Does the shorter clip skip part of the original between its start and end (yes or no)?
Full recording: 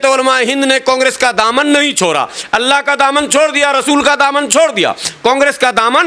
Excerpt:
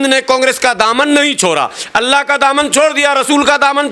no